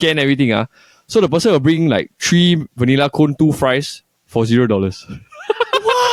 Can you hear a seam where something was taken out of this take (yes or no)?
no